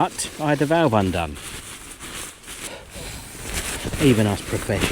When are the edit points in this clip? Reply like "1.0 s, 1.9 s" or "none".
2.7 s